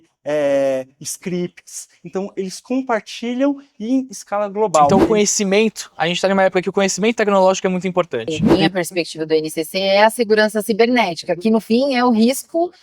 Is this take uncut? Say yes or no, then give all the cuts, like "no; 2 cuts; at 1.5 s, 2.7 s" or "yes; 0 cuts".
no; 2 cuts; at 4.9 s, 8.2 s